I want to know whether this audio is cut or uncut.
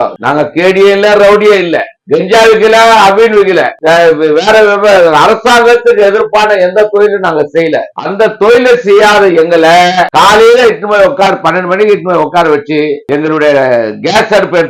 uncut